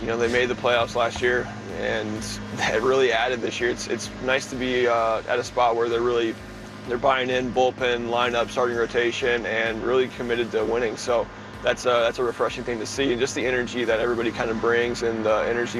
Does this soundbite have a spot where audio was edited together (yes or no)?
no